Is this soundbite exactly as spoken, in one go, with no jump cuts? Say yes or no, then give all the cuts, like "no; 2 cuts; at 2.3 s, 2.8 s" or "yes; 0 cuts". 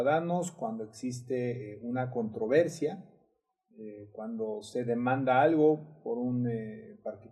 yes; 0 cuts